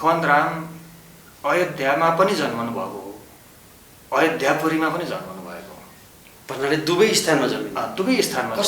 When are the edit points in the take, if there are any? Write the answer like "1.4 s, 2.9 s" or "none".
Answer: none